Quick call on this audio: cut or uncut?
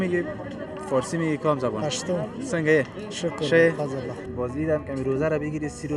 cut